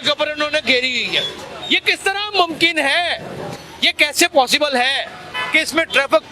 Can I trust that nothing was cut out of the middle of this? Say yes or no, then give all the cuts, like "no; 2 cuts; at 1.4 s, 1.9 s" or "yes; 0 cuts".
yes; 0 cuts